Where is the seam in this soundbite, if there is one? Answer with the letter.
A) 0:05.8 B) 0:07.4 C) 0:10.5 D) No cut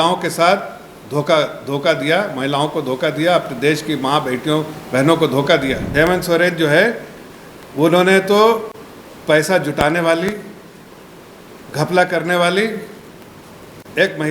A